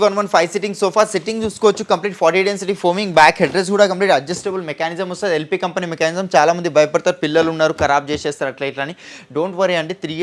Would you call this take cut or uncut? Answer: uncut